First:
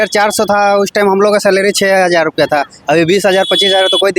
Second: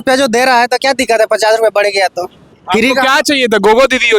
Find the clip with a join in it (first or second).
second